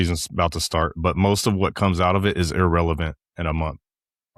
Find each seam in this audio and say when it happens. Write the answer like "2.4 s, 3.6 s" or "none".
none